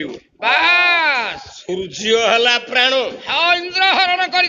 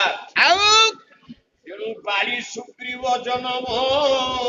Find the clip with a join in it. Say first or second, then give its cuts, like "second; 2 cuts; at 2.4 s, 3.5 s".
first; 1 cut; at 1.5 s